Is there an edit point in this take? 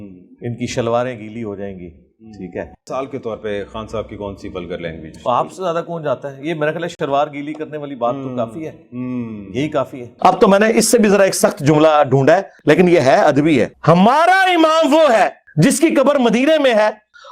yes; 5 cuts; at 1.8 s, 2.8 s, 6.9 s, 10.1 s, 12.6 s

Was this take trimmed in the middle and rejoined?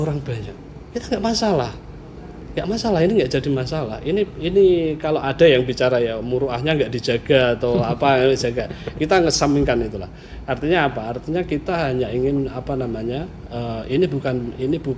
no; 0 cuts

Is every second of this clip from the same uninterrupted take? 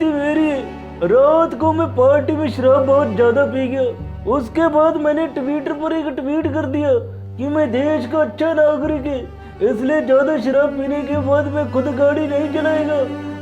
yes; 0 cuts

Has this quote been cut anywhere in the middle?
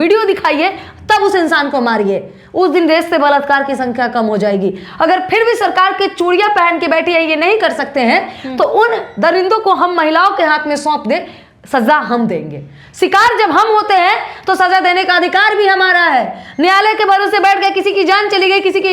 no; 0 cuts

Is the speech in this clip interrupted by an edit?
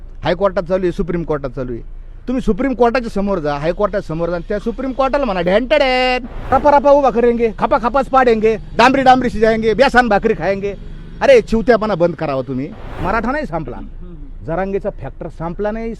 yes; 2 cuts; at 6.5 s, 13.0 s

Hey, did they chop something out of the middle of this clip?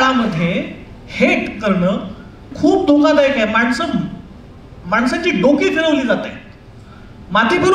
yes; 1 cut; at 2.5 s

